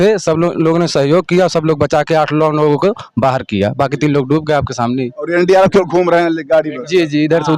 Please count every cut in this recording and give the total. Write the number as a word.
zero